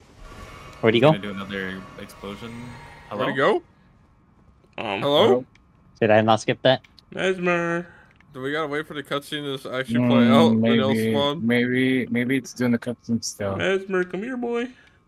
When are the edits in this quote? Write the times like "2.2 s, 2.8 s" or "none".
none